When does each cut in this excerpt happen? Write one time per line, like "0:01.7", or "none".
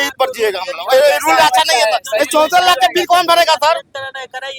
none